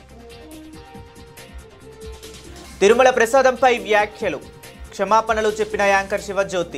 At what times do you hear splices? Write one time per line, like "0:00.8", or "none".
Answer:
0:01.2